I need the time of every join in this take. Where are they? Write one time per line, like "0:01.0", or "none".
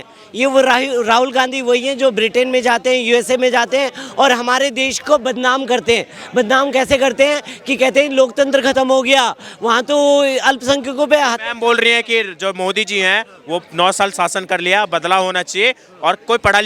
none